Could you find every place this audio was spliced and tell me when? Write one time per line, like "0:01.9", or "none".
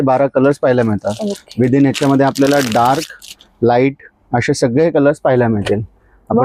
none